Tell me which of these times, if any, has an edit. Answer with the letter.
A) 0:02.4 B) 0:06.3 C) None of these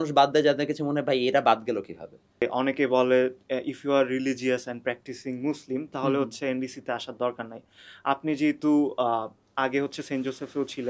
A